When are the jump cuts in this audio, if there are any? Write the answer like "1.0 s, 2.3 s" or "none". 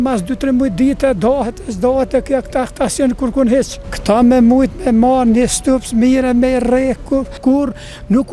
3.8 s, 7.3 s